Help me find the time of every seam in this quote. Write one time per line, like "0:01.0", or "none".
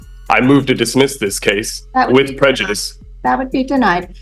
none